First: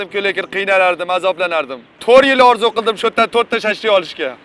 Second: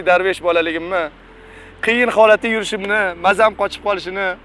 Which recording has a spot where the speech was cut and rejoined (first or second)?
first